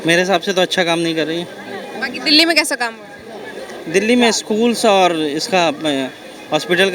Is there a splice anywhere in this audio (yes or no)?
no